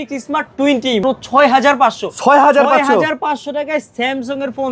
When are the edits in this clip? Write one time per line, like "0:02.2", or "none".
0:01.0